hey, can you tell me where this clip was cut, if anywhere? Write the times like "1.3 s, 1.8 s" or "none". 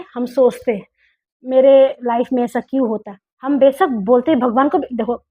none

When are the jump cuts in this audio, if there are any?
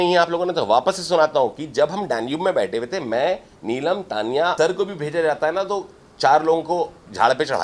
4.5 s

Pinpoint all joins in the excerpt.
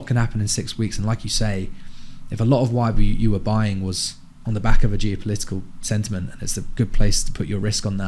none

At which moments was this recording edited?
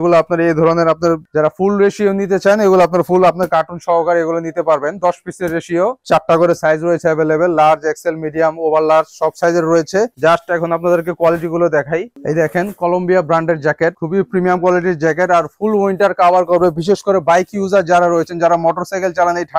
none

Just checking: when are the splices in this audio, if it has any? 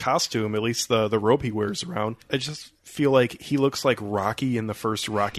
2.2 s

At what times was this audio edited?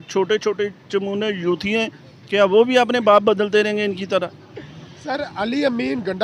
none

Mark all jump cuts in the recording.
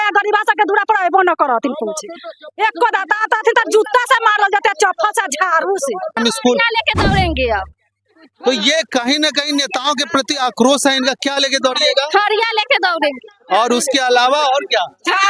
6.1 s

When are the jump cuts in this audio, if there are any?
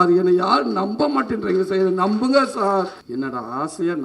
3.0 s

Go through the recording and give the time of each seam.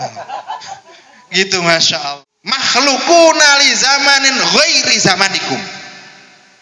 1.9 s

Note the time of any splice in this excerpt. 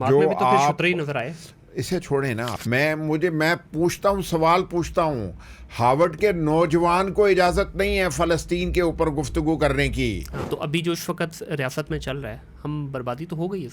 2.6 s, 10.3 s

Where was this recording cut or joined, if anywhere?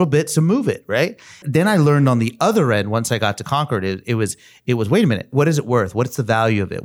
1.4 s, 5.3 s

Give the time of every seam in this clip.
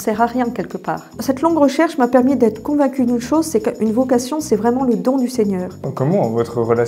1.1 s, 5.9 s

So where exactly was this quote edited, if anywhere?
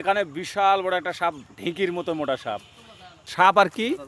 3.2 s

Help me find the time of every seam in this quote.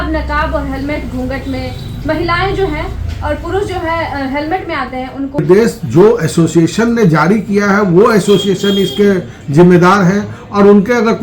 5.4 s

